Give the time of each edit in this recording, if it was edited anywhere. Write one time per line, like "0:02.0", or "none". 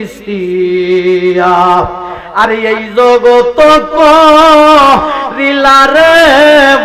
none